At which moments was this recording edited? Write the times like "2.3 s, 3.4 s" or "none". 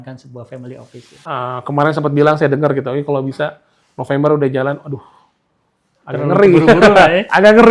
1.1 s